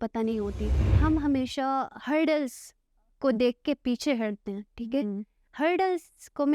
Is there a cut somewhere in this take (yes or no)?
yes